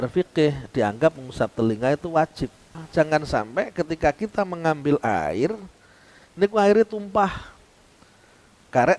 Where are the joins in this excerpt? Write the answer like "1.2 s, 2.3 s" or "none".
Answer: 2.8 s